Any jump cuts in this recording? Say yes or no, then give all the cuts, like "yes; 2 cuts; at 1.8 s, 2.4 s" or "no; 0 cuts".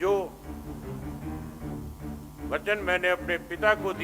yes; 2 cuts; at 0.8 s, 2.5 s